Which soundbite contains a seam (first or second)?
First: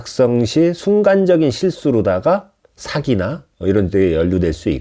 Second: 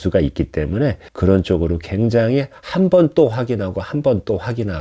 second